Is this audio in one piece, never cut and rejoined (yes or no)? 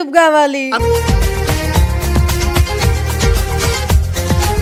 yes